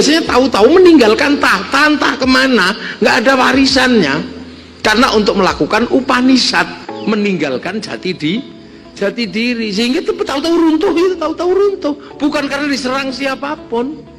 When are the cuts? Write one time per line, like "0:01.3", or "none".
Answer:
0:06.8